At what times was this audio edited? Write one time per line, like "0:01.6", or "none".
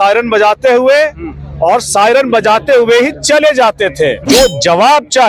0:04.2